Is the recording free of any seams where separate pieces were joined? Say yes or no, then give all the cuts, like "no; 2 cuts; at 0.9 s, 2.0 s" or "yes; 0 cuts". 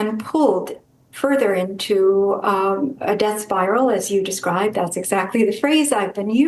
yes; 0 cuts